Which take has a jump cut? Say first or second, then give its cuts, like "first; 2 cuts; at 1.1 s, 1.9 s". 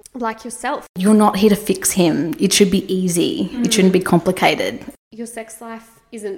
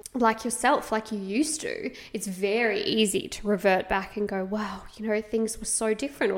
first; 2 cuts; at 0.9 s, 4.9 s